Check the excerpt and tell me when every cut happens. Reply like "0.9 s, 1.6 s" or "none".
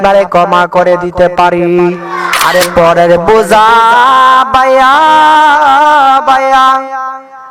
2.3 s

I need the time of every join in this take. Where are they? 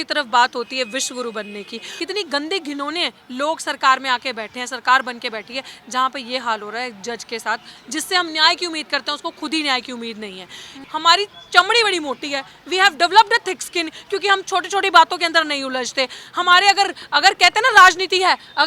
1.8 s, 10.8 s

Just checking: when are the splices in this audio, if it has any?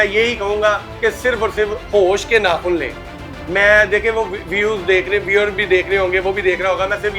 none

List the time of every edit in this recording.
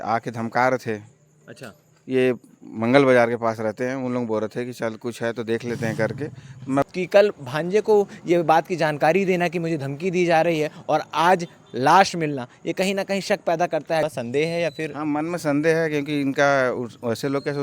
6.8 s, 14.0 s

